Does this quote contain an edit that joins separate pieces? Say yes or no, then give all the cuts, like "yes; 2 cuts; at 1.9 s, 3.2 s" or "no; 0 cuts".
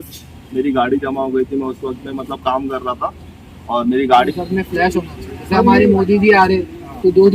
yes; 1 cut; at 4.3 s